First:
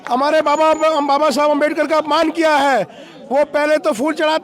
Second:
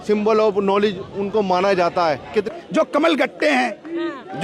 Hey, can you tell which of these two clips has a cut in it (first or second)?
second